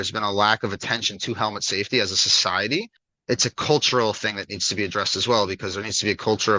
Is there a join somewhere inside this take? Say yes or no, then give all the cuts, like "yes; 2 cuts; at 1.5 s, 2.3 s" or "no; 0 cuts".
yes; 1 cut; at 3.0 s